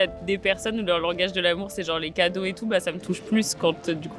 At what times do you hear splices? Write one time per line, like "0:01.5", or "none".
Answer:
none